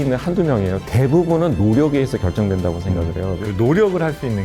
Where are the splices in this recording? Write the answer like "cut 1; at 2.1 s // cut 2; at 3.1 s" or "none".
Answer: cut 1; at 0.8 s // cut 2; at 3.4 s